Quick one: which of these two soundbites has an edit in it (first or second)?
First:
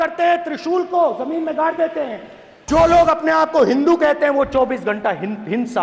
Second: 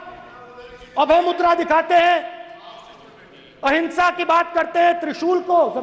first